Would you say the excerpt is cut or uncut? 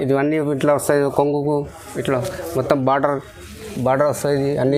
uncut